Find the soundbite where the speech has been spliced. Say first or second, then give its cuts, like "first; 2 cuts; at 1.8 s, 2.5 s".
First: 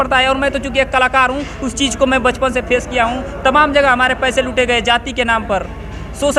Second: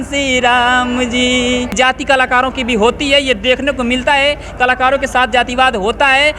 second; 1 cut; at 1.7 s